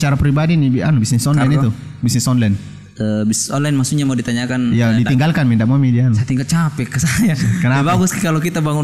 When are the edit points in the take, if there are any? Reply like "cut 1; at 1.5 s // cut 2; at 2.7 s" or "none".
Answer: none